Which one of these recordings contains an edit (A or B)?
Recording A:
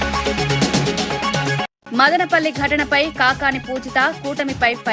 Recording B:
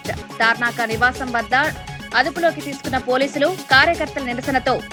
A